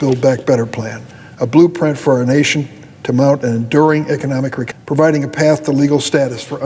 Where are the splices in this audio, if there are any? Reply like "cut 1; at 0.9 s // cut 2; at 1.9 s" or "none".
cut 1; at 4.6 s